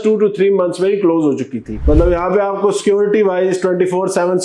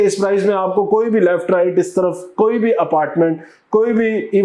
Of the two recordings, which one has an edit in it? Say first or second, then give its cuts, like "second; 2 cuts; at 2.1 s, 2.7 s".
first; 1 cut; at 1.6 s